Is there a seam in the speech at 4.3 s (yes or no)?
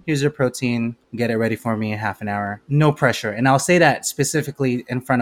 no